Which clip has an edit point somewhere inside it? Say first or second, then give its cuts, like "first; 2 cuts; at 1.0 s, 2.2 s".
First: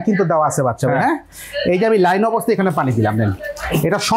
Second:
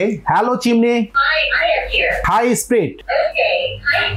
second; 3 cuts; at 1.2 s, 2.2 s, 3.0 s